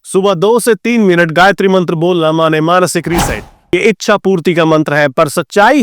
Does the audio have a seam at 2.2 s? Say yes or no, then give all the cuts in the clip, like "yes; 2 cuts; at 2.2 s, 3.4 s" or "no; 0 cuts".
no; 1 cut; at 3.7 s